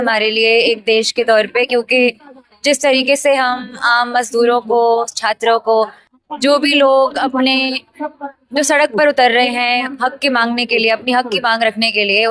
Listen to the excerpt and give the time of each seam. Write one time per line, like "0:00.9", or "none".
none